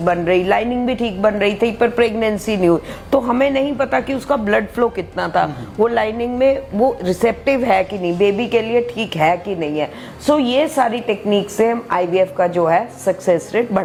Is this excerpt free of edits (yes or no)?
yes